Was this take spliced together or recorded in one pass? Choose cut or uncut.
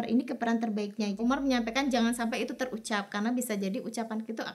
cut